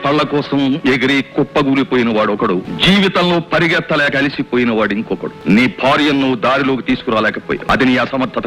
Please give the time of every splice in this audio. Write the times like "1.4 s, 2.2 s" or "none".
2.7 s, 5.3 s, 7.6 s